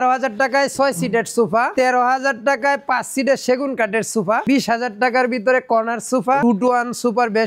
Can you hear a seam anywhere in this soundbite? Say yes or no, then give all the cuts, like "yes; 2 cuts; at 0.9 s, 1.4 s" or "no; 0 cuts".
yes; 3 cuts; at 1.7 s, 4.4 s, 6.4 s